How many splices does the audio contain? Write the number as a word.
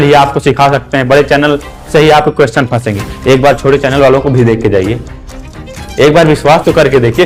zero